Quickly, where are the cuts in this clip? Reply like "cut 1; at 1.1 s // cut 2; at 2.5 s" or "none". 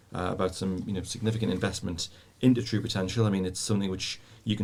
none